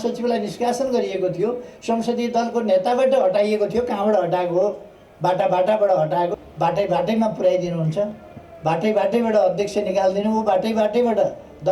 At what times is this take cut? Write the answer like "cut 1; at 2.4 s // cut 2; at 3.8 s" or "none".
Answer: cut 1; at 6.4 s